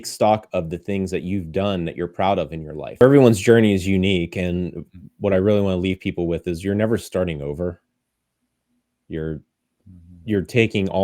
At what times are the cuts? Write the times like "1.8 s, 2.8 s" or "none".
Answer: 3.0 s